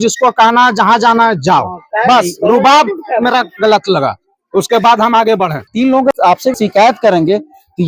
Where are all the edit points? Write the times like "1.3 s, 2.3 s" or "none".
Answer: 5.6 s